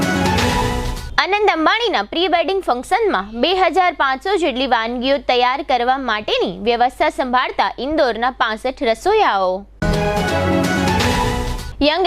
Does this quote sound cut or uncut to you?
uncut